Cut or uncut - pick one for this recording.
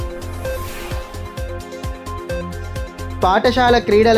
uncut